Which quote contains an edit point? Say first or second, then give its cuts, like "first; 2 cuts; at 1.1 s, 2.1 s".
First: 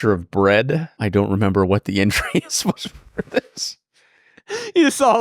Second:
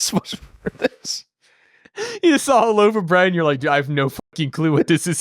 first; 1 cut; at 0.9 s